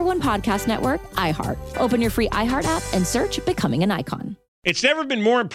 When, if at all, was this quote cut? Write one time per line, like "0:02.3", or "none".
0:04.5